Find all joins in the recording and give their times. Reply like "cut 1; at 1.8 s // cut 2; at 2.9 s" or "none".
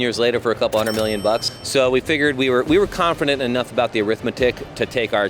cut 1; at 1.4 s